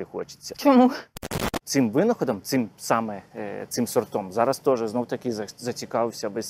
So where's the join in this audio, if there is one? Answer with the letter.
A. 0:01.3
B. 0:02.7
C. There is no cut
A